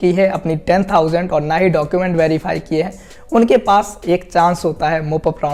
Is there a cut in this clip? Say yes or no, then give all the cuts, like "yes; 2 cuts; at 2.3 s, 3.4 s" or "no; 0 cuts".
no; 0 cuts